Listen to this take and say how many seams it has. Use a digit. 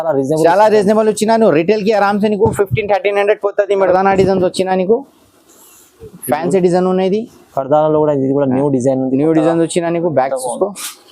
1